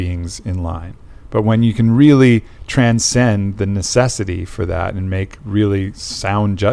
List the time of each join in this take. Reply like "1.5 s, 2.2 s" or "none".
none